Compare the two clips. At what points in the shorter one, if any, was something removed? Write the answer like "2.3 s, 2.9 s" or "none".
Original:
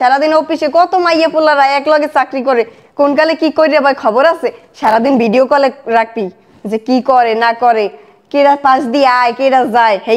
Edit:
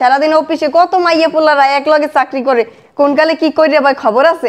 none